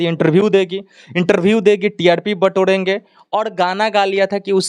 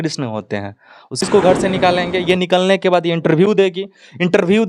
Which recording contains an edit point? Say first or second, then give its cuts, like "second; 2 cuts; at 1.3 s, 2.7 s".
second; 1 cut; at 1.3 s